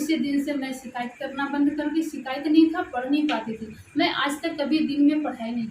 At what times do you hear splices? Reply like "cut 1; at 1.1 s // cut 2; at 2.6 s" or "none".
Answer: none